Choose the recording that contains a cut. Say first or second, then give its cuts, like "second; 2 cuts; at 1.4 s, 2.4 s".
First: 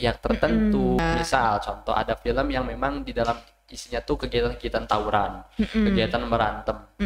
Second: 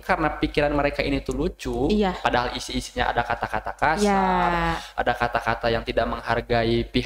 first; 1 cut; at 1.0 s